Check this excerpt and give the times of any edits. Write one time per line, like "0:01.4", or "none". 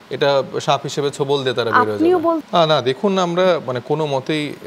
0:02.4